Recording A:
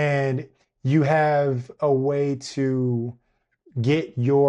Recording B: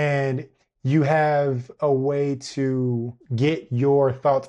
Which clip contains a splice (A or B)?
B